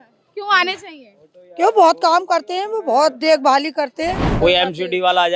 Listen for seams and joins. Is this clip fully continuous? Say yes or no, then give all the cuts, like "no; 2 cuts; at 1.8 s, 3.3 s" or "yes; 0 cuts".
no; 1 cut; at 4.3 s